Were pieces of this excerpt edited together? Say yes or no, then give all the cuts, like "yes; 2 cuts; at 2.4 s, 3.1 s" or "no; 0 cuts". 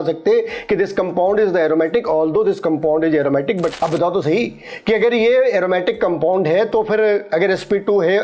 yes; 1 cut; at 3.7 s